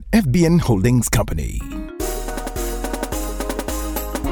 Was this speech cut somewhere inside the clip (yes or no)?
yes